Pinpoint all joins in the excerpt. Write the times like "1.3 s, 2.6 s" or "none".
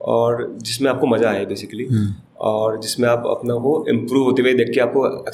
none